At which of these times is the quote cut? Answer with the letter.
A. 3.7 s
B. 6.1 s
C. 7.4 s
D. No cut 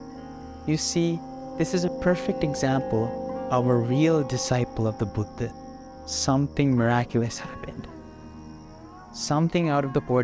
B